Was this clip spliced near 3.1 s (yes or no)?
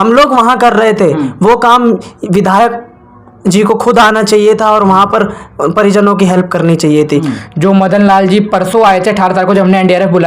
no